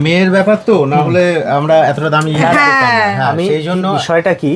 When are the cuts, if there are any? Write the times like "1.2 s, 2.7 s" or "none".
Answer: none